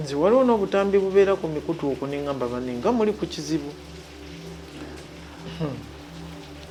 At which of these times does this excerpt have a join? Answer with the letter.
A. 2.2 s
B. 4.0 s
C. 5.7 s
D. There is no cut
D